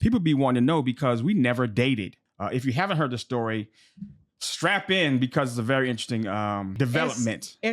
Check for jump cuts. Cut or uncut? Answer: cut